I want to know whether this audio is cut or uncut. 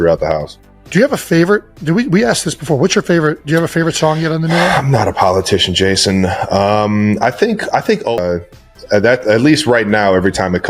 cut